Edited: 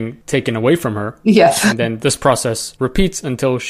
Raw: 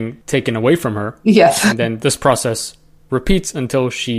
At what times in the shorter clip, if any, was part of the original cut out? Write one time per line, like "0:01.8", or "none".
0:02.7

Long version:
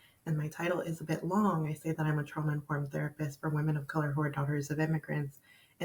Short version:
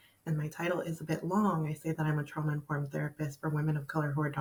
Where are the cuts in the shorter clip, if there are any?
none

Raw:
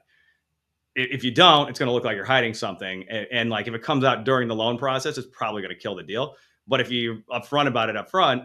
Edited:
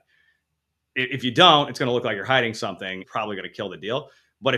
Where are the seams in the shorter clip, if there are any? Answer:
0:03.0

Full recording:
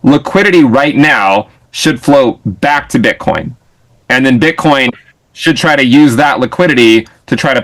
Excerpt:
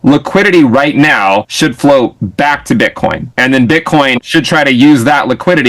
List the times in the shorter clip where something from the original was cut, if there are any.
0:01.5
0:03.3
0:04.2

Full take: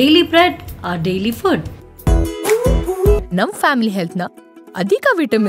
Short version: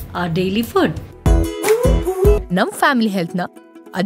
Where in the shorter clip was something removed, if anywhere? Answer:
0:01.1

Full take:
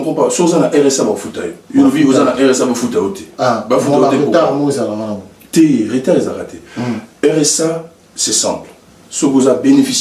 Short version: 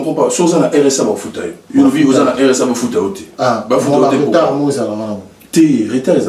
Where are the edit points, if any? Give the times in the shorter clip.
none

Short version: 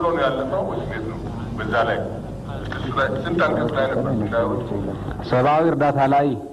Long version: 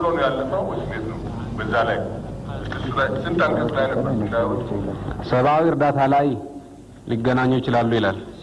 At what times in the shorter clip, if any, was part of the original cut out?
none

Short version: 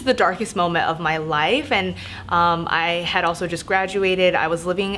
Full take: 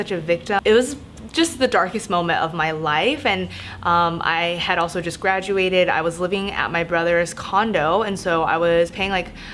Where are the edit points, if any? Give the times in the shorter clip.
none

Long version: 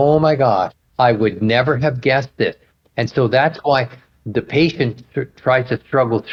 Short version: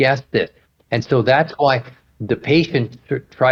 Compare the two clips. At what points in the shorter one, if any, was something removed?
none

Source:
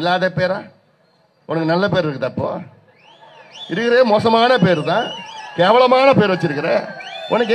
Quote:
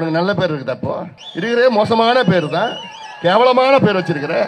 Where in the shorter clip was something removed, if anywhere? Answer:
0:01.2

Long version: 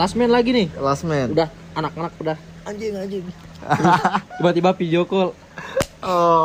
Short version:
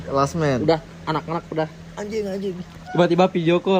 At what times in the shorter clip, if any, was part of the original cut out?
0:02.9

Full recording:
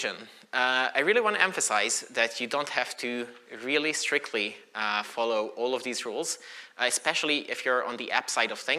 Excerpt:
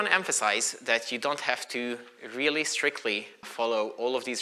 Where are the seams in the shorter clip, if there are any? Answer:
0:03.5

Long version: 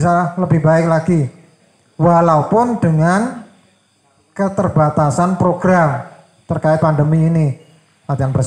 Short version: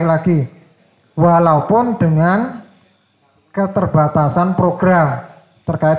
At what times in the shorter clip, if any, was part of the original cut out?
none

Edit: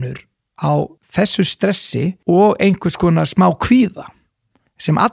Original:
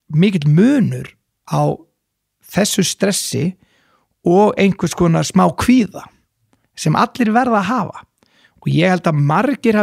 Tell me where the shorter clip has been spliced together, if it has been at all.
0:01.0
0:02.2

